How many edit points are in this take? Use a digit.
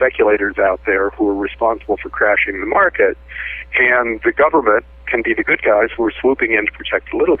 0